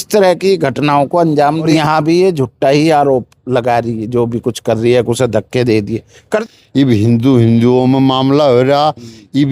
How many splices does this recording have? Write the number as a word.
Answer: two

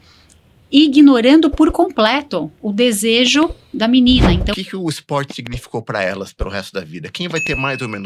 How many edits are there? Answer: one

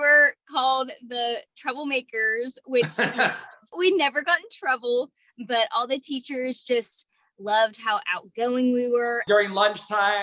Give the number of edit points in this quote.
one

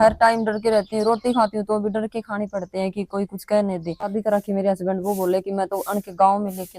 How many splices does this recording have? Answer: one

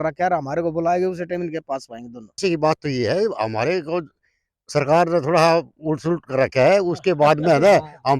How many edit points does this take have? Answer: one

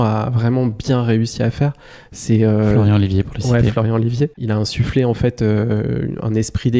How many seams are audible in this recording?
one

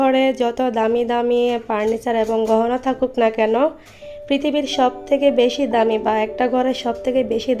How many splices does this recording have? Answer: zero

